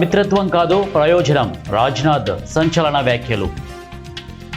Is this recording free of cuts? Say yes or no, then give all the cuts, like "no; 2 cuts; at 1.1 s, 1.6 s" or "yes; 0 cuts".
yes; 0 cuts